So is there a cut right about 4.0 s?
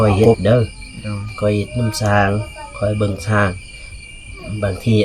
no; 0 cuts

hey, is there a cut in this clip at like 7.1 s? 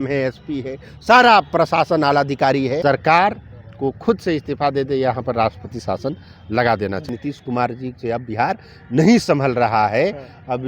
yes; 2 cuts; at 2.8 s, 7.1 s

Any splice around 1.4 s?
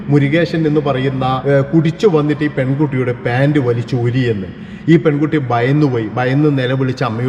yes; 1 cut; at 1.4 s

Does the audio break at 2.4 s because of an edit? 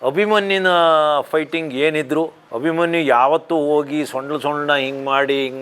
yes; 1 cut; at 2.4 s

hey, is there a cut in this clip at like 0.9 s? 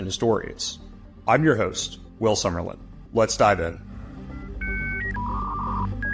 no; 0 cuts

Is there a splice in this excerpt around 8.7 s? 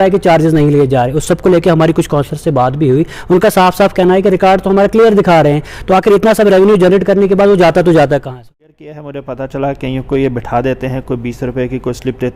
yes; 1 cut; at 8.7 s

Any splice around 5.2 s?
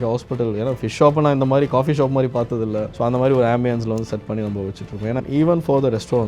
yes; 1 cut; at 5.2 s

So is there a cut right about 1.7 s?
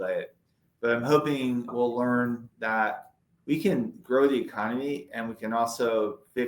yes; 2 cuts; at 1.7 s, 3.3 s

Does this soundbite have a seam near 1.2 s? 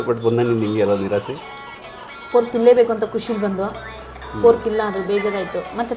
no; 0 cuts

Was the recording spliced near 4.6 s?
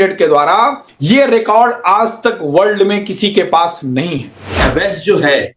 yes; 1 cut; at 4.6 s

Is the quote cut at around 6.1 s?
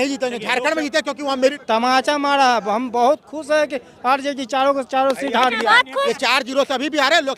yes; 2 cuts; at 1.6 s, 6.1 s

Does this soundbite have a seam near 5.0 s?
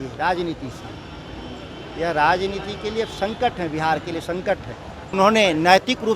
yes; 1 cut; at 5.0 s

